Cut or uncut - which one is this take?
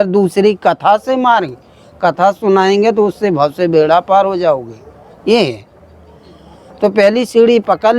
uncut